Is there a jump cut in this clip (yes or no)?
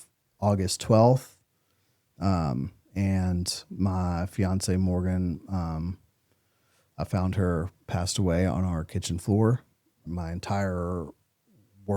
yes